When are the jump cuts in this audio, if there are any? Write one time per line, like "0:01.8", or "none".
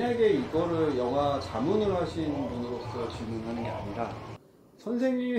none